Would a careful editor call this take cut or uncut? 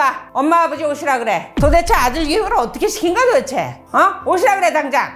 uncut